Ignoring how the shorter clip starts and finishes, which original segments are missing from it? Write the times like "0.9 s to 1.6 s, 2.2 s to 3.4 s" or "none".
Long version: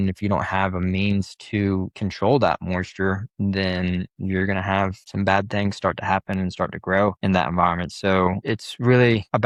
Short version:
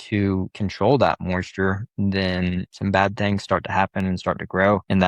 4.1 s to 5.0 s